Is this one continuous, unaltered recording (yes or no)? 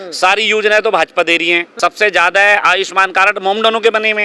no